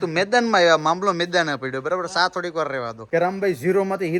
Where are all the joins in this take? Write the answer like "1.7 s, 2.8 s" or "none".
2.9 s